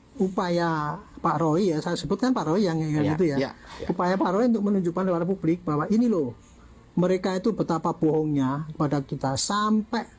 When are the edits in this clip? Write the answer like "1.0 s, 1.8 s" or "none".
none

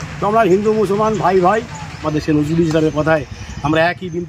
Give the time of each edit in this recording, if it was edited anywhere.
2.1 s

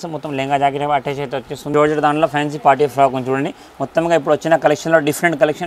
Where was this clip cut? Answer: 1.7 s

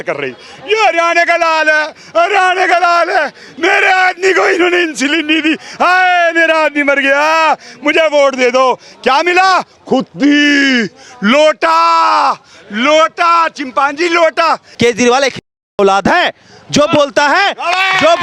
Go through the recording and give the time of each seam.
14.7 s

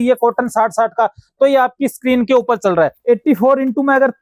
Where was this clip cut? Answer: 3.0 s

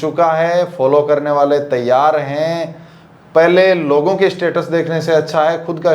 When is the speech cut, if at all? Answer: none

